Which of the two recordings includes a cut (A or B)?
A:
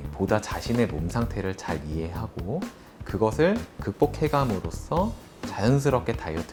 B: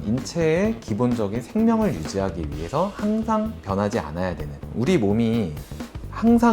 B